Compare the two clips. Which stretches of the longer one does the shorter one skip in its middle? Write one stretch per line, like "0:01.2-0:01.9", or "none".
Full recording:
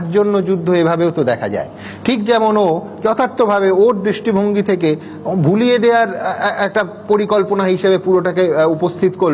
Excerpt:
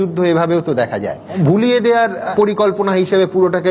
0:01.7-0:05.2
0:06.2-0:07.0